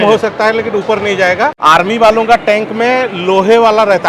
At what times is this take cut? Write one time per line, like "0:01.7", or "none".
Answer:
0:01.6